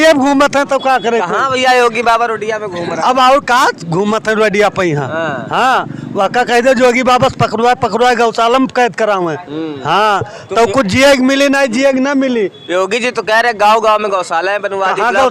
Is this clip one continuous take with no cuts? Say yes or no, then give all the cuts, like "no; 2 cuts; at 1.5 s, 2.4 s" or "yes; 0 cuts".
yes; 0 cuts